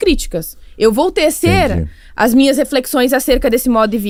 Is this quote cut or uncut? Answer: uncut